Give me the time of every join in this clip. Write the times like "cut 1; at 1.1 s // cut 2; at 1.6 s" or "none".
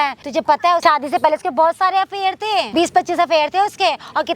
cut 1; at 0.7 s // cut 2; at 2.7 s